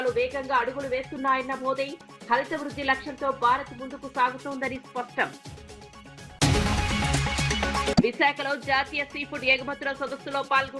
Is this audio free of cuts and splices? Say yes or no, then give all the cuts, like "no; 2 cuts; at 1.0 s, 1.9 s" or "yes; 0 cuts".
yes; 0 cuts